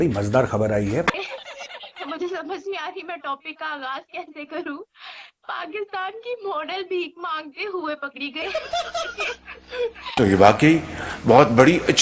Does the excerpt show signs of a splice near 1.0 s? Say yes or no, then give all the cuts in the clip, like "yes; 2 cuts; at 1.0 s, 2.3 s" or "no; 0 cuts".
yes; 1 cut; at 1.0 s